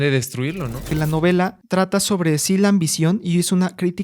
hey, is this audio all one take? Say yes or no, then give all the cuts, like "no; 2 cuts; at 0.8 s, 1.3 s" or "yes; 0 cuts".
no; 2 cuts; at 0.9 s, 1.6 s